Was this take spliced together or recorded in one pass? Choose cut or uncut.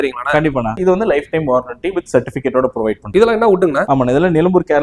cut